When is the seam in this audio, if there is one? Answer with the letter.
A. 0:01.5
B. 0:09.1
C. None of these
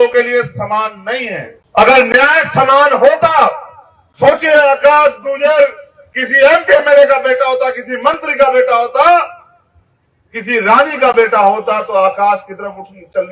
A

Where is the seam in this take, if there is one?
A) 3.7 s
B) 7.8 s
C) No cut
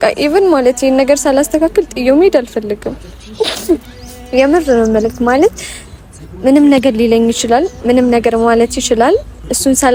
C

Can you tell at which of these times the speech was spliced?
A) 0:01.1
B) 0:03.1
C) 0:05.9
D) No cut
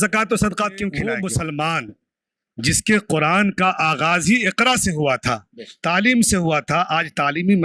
A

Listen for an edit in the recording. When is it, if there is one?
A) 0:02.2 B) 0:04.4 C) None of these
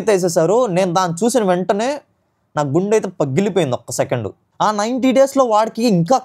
B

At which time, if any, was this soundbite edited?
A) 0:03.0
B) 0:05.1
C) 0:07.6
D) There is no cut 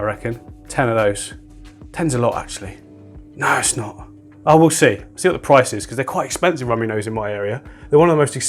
D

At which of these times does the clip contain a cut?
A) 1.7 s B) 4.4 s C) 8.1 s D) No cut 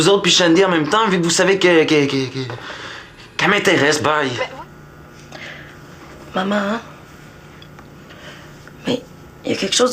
B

